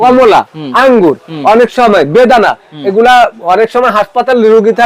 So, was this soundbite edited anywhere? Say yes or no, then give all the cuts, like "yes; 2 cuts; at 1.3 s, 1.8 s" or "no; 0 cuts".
no; 0 cuts